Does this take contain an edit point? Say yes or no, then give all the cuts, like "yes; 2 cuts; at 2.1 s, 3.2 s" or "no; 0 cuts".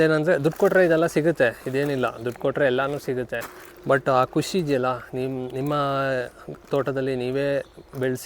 no; 0 cuts